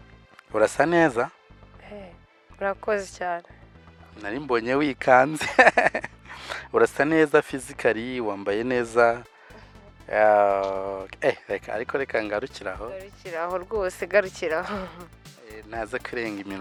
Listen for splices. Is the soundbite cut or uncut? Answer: uncut